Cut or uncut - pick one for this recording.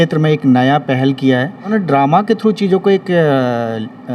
cut